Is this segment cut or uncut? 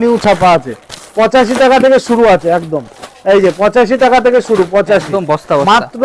uncut